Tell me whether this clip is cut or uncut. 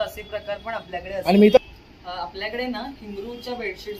cut